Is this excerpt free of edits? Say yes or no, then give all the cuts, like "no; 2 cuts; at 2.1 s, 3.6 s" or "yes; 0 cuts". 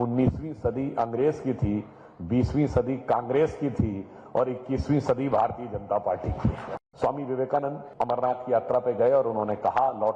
no; 2 cuts; at 6.7 s, 7.8 s